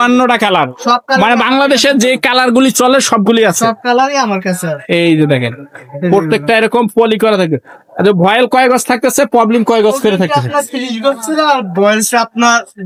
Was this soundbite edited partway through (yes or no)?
no